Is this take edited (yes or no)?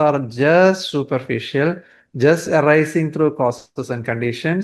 no